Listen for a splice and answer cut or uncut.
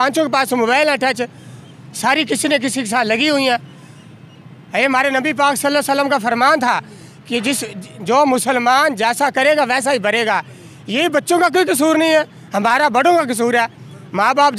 uncut